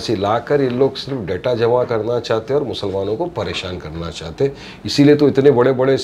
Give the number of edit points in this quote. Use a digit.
0